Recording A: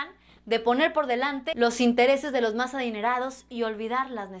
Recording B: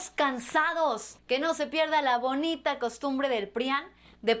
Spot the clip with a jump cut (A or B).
B